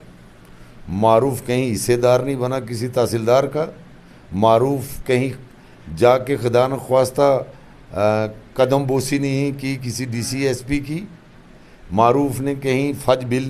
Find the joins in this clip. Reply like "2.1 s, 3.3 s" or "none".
none